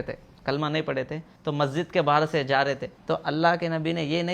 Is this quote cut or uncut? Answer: cut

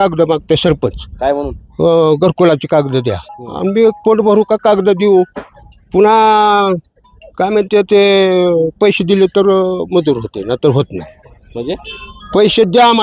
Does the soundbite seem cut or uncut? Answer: uncut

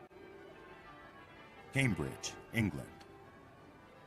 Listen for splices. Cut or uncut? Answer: cut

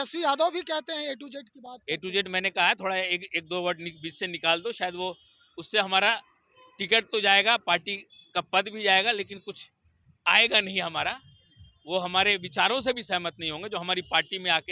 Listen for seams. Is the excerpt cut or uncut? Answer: uncut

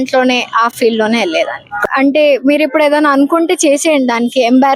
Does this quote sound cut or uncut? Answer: cut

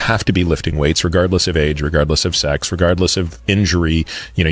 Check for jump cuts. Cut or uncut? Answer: uncut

